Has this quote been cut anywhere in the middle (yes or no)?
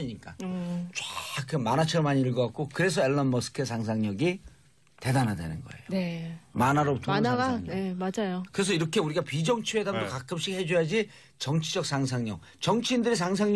yes